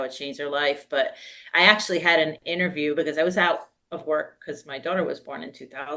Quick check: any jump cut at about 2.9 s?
no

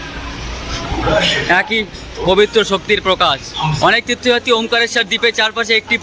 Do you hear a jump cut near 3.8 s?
yes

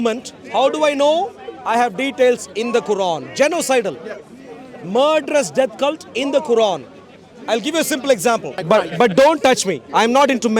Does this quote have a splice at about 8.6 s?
yes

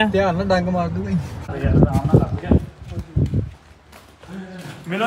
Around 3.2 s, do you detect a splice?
no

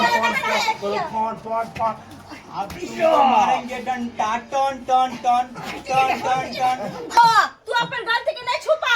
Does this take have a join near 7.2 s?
yes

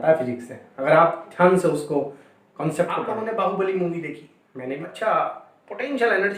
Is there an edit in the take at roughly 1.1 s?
no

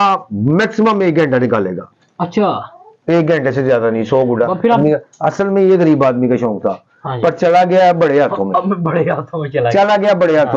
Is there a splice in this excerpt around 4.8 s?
yes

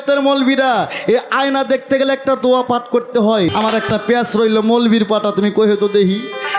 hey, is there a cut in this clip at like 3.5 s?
yes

